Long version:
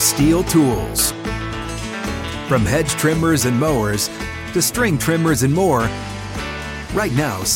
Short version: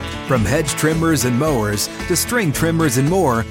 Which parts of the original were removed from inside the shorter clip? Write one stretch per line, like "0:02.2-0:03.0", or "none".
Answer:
0:04.1-0:04.4